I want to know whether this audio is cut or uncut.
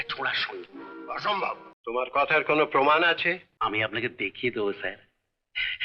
cut